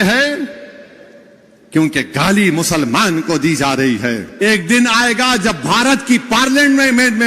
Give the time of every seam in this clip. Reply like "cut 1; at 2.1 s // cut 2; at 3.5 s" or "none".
cut 1; at 4.3 s